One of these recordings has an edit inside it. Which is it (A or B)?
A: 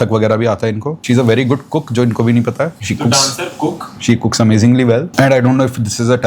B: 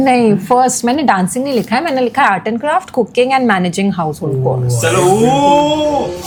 A